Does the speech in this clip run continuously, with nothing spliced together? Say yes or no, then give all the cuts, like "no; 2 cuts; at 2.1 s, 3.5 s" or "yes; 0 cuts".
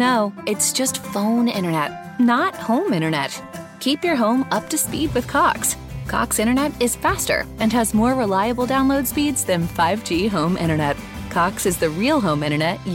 yes; 0 cuts